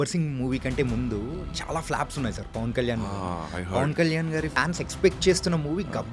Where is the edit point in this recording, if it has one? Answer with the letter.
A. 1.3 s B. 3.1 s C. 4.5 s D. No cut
C